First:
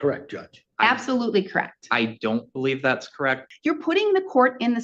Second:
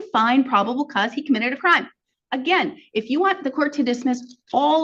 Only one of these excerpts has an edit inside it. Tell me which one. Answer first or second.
first